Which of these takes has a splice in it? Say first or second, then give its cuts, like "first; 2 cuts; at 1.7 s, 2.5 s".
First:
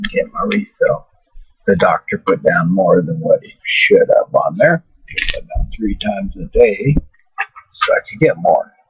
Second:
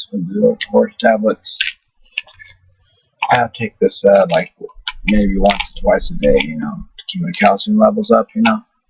second; 1 cut; at 6.1 s